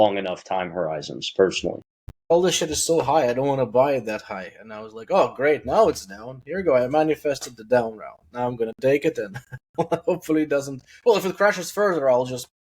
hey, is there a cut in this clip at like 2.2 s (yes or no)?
yes